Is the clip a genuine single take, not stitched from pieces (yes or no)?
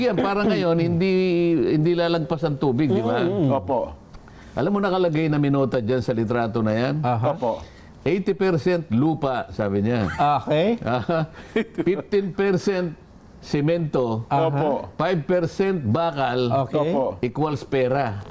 yes